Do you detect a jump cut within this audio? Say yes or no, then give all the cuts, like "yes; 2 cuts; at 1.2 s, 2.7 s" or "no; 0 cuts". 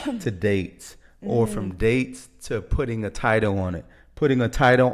no; 0 cuts